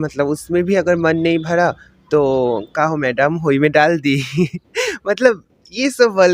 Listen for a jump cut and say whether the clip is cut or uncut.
uncut